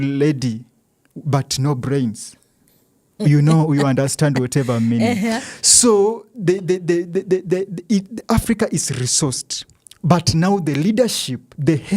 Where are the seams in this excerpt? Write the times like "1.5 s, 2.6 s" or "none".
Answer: none